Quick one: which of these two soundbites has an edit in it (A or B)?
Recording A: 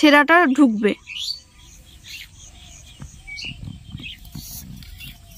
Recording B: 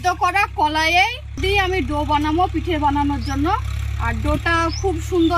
B